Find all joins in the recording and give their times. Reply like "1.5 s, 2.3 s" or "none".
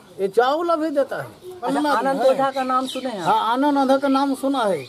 1.5 s